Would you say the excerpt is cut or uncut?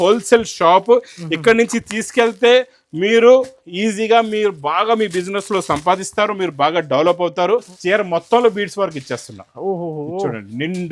cut